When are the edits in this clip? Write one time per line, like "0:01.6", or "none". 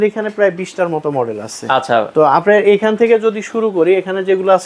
none